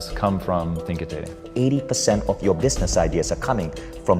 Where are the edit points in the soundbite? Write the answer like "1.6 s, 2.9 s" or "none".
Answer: 1.4 s